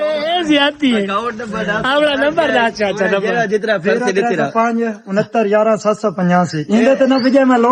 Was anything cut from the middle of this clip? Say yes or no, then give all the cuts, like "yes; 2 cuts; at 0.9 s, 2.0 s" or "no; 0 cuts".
no; 0 cuts